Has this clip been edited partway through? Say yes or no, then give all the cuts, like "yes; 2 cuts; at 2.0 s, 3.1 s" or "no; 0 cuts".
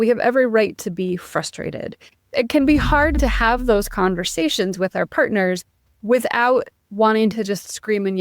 yes; 1 cut; at 2.3 s